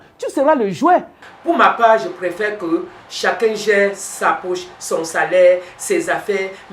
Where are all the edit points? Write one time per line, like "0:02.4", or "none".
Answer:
0:01.1